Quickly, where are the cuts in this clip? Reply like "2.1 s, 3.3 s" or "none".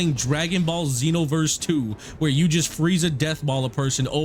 none